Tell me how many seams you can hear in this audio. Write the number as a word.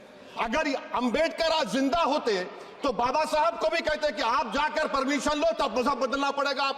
zero